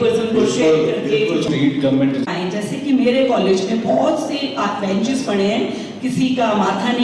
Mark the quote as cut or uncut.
cut